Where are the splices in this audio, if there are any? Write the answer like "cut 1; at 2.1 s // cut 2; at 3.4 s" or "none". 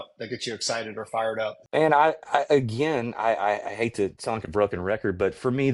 cut 1; at 1.6 s